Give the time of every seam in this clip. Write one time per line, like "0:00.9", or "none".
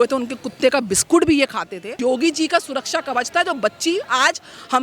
0:02.0